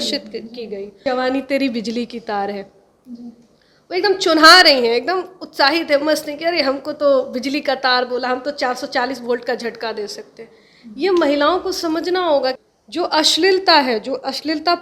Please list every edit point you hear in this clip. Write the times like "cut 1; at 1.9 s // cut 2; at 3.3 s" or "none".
cut 1; at 1.0 s // cut 2; at 12.6 s